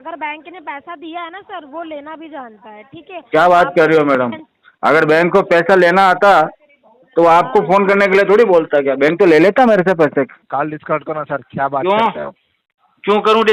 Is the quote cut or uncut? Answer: cut